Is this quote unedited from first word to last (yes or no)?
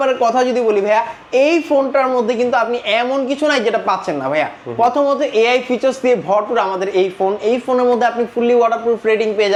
yes